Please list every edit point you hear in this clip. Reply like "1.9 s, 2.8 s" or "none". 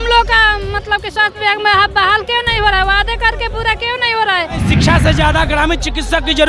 4.7 s